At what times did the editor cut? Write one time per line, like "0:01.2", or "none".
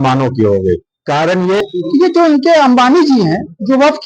0:01.7